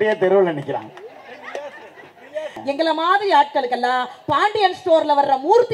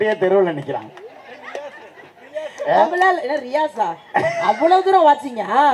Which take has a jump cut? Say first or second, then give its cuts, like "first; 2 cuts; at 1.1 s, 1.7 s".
first; 1 cut; at 2.6 s